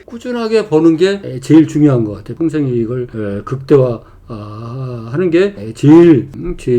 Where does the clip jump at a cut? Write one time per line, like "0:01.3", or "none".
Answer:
0:02.3